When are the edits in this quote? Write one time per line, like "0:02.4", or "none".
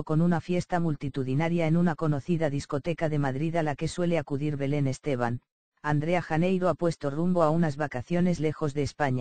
none